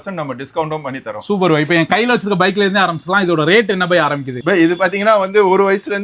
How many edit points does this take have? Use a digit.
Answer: 0